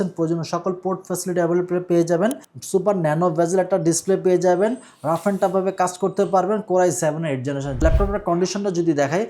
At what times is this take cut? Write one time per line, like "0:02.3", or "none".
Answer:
0:02.5
0:07.8